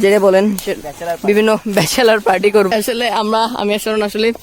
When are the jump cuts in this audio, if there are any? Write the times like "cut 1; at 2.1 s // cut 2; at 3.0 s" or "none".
cut 1; at 2.7 s